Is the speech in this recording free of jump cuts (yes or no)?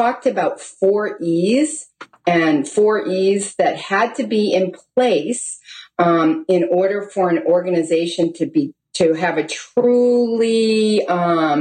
yes